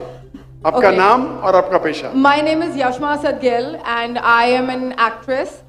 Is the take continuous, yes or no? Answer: yes